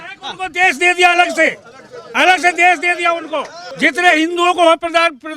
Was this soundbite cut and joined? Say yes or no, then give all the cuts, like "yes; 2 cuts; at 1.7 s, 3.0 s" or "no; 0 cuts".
yes; 1 cut; at 3.6 s